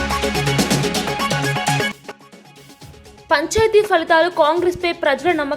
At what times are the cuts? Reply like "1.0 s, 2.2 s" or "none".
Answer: 1.9 s